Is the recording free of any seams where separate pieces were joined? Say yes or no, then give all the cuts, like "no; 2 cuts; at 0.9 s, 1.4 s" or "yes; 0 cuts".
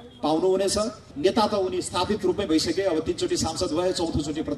no; 1 cut; at 1.0 s